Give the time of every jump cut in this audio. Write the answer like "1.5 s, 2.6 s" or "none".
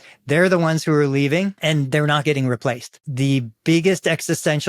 1.6 s, 3.0 s